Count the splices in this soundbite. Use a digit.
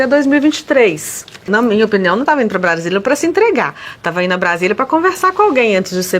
1